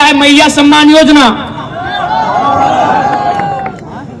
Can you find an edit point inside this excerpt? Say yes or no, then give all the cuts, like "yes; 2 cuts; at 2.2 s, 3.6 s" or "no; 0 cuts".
no; 0 cuts